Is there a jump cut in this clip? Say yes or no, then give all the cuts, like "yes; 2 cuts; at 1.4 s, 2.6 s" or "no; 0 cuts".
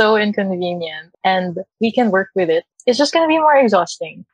yes; 3 cuts; at 1.0 s, 1.7 s, 2.7 s